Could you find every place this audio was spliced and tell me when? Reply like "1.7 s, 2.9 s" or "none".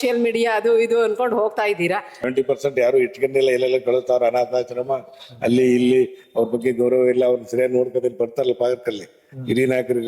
2.3 s